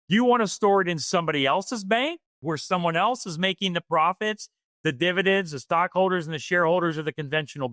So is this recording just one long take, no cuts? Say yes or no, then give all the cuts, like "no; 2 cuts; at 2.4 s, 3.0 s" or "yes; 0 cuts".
no; 1 cut; at 2.3 s